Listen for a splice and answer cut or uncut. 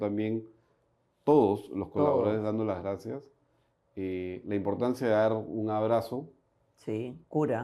uncut